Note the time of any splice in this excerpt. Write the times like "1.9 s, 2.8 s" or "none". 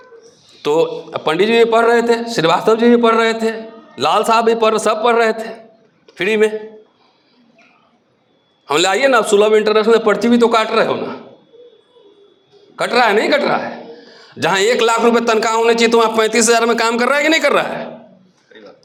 none